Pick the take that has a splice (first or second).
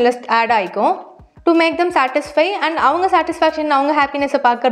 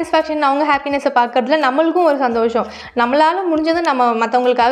first